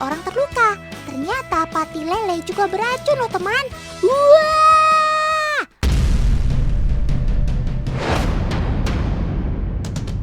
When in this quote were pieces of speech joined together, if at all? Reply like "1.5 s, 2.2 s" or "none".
8.1 s